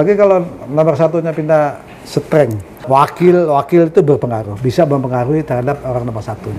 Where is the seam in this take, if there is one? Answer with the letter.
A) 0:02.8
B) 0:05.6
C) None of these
A